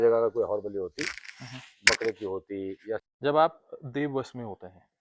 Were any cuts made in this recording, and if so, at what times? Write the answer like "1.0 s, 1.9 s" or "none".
3.1 s